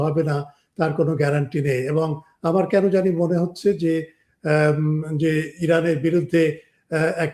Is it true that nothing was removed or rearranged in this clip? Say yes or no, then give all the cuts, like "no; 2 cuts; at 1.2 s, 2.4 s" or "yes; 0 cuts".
yes; 0 cuts